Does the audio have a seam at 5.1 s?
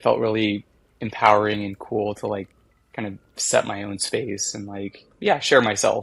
yes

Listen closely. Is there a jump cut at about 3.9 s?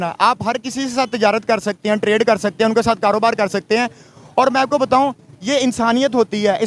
no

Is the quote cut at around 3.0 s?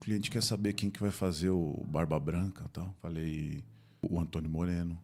yes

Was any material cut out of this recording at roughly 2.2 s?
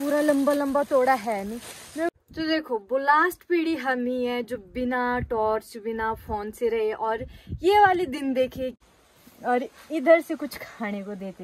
yes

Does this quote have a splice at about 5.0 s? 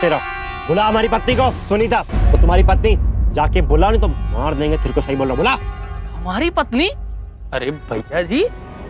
no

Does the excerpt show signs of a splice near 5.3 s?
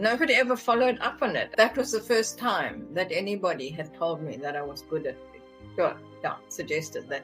no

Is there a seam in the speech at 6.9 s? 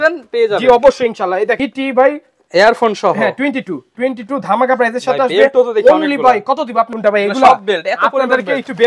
yes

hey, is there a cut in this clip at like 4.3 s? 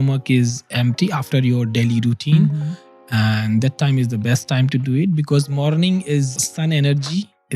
no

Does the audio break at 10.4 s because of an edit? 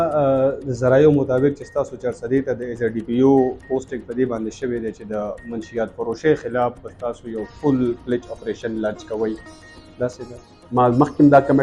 yes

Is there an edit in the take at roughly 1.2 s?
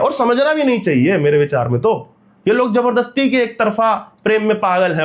no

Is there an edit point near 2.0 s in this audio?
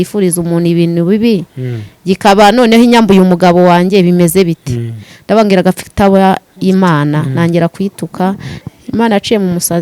no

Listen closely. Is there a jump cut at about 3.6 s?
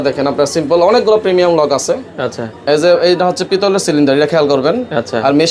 no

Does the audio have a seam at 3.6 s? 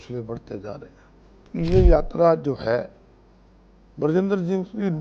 no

